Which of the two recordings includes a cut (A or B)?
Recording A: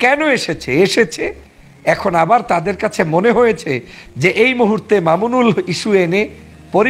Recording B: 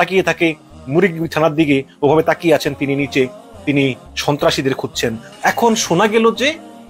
B